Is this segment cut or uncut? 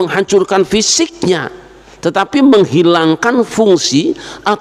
uncut